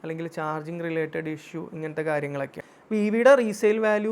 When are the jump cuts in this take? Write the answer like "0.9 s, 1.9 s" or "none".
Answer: 2.7 s